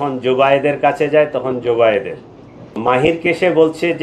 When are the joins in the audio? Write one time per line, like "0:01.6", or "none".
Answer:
0:02.8